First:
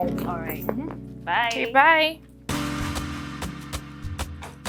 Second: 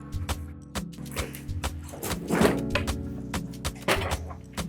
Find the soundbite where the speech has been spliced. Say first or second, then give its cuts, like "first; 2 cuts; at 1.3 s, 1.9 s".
second; 1 cut; at 1.0 s